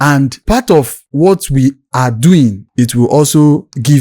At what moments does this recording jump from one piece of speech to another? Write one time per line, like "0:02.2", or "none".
0:02.7